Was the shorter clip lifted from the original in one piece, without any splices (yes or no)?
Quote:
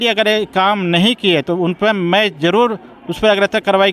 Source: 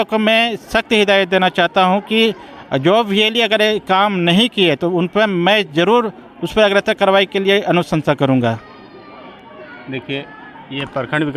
yes